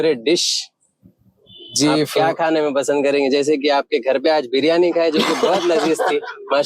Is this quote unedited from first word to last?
yes; 0 cuts

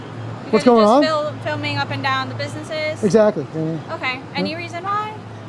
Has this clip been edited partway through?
no; 0 cuts

